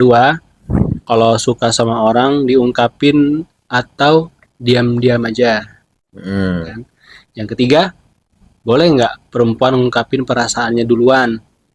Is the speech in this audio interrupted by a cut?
no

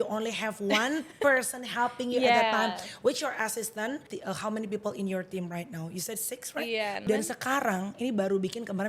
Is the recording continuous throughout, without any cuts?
no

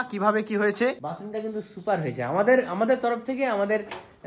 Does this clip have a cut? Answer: yes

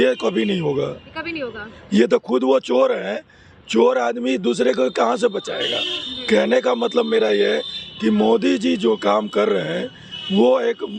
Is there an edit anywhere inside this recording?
no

